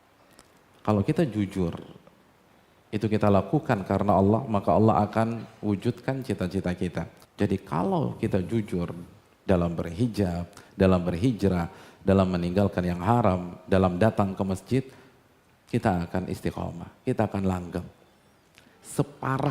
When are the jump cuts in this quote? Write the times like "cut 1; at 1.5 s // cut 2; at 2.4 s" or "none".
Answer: cut 1; at 7.2 s